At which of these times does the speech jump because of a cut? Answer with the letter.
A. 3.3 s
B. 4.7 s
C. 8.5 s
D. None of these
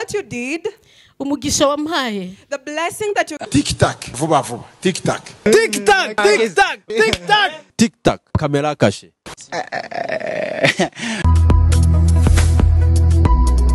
A